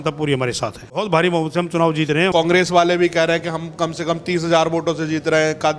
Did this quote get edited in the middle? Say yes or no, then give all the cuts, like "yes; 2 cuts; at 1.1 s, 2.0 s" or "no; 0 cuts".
yes; 2 cuts; at 1.0 s, 2.3 s